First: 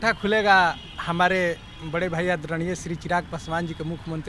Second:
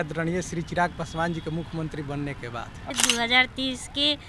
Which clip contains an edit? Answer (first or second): second